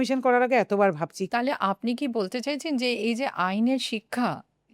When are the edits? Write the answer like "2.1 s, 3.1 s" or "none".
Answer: 1.2 s